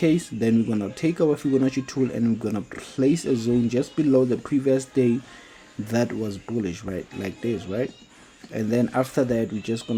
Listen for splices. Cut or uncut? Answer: uncut